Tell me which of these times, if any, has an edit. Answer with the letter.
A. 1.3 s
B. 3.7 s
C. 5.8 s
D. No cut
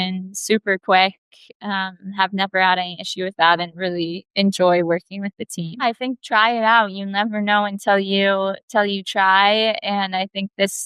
C